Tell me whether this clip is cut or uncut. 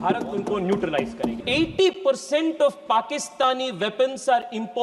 cut